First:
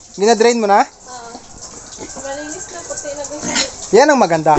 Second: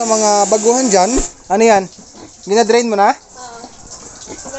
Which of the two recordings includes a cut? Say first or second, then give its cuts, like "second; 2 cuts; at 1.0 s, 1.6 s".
second; 1 cut; at 1.2 s